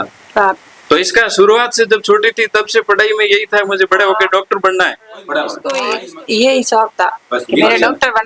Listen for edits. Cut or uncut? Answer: cut